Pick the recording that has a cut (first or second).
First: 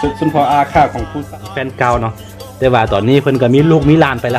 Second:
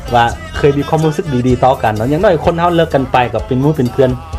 first